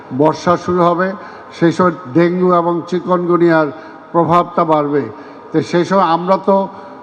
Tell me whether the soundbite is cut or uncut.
uncut